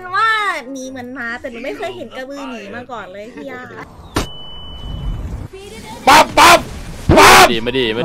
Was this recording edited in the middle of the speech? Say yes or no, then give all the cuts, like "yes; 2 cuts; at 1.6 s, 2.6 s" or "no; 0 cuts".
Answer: yes; 1 cut; at 5.4 s